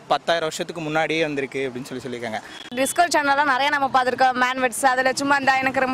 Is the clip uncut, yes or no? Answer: no